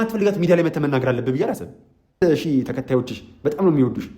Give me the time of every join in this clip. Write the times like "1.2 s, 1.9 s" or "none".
2.2 s